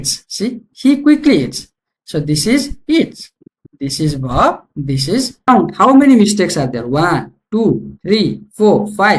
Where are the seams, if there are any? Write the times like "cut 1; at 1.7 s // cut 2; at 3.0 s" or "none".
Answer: cut 1; at 5.5 s